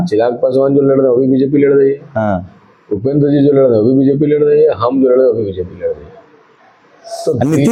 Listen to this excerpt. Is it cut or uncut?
uncut